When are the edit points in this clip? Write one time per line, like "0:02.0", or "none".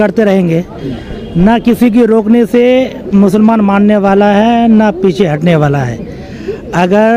none